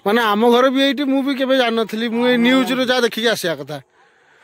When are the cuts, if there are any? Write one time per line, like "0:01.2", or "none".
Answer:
none